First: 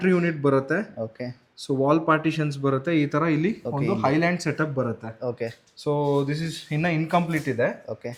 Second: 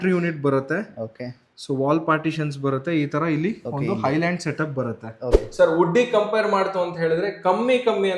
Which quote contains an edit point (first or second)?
second